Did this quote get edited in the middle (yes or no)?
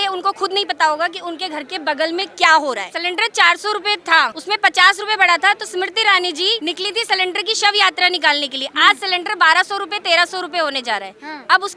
yes